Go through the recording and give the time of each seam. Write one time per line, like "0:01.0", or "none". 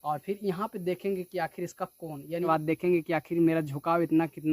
0:02.5